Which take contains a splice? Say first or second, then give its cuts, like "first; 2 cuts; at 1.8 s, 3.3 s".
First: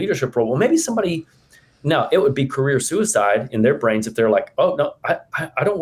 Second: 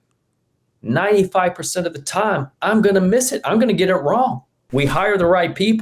second; 1 cut; at 4.7 s